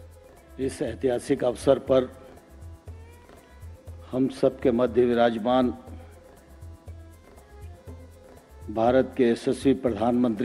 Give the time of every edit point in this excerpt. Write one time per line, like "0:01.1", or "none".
none